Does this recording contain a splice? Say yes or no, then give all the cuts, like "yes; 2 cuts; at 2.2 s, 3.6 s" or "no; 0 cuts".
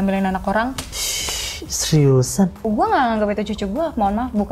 yes; 1 cut; at 2.6 s